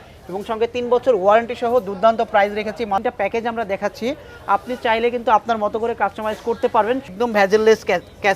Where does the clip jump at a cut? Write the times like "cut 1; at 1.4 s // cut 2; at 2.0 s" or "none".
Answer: cut 1; at 3.0 s // cut 2; at 7.1 s